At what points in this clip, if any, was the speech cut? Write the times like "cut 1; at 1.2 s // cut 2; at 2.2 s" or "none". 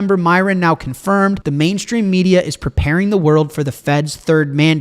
cut 1; at 1.4 s

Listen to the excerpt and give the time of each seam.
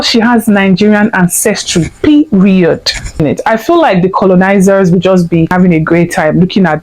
cut 1; at 3.1 s // cut 2; at 5.5 s

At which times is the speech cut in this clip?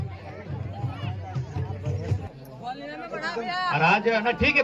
cut 1; at 2.3 s

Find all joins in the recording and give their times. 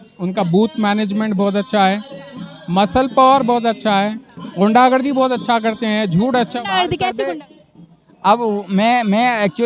cut 1; at 7.2 s

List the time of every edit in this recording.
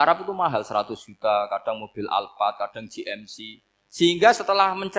none

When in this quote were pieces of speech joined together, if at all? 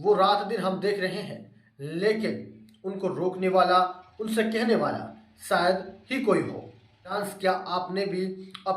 cut 1; at 7.3 s

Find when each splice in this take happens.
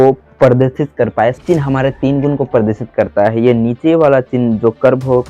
cut 1; at 1.4 s

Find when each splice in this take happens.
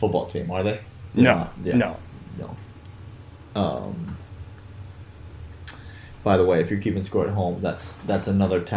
none

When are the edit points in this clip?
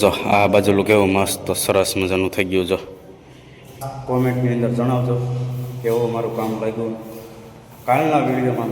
cut 1; at 3.7 s

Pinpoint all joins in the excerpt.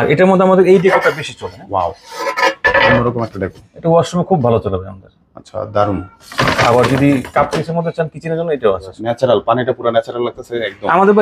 cut 1; at 9.0 s

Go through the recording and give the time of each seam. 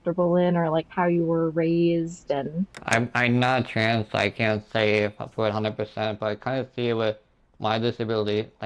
cut 1; at 2.8 s

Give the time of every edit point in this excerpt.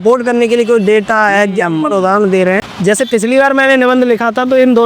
cut 1; at 2.6 s

